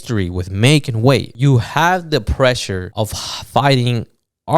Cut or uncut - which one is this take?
cut